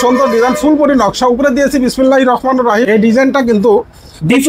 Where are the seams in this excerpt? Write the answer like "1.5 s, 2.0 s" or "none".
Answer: 2.9 s